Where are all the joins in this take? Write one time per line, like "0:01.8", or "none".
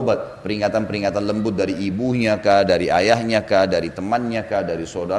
none